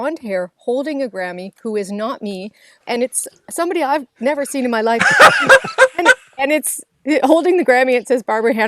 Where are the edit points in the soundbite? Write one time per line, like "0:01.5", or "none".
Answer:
0:02.8